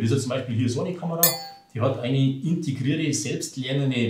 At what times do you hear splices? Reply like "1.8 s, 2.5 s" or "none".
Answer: none